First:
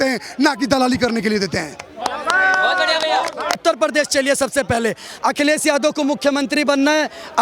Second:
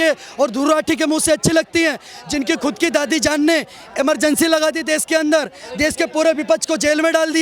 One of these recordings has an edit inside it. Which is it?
first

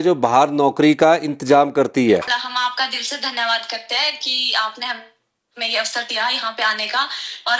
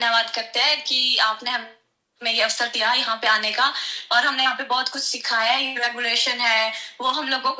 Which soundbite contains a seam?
first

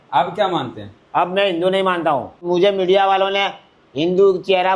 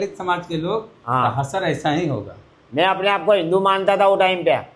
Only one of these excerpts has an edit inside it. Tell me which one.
first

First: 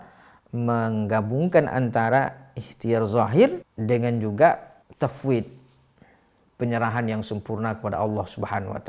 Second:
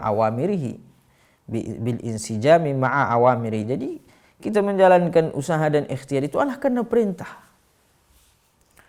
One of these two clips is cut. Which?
first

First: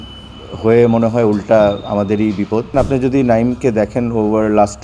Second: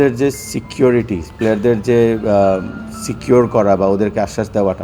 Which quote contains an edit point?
first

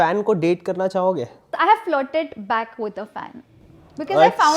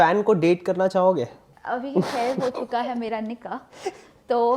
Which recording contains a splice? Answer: first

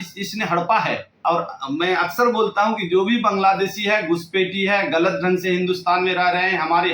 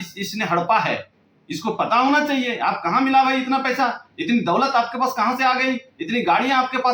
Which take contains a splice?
first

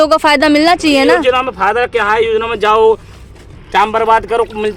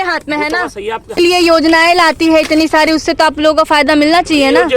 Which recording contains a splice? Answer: second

